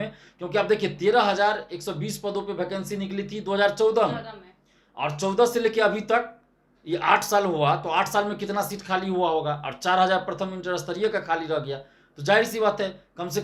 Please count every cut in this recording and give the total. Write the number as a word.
zero